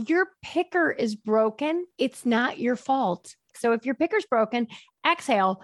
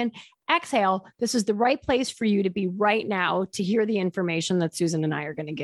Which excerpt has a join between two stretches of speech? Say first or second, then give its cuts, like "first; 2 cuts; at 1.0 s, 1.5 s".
first; 2 cuts; at 1.9 s, 3.5 s